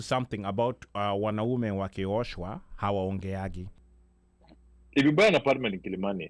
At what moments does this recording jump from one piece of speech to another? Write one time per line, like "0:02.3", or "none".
0:03.7